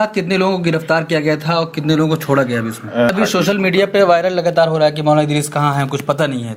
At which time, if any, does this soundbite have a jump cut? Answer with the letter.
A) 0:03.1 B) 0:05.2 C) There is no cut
A